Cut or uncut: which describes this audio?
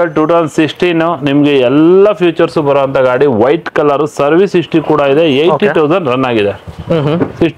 uncut